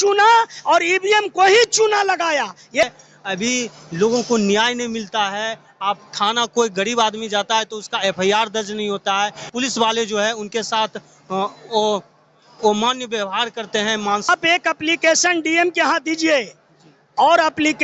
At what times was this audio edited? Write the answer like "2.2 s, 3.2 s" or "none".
2.8 s, 9.4 s, 14.3 s